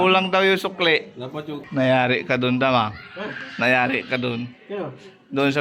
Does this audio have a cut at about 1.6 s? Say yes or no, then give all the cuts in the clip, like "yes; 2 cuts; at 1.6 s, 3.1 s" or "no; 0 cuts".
yes; 1 cut; at 1.6 s